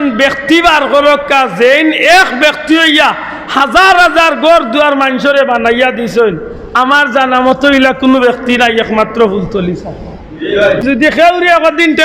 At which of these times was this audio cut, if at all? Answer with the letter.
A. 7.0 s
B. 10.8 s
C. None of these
B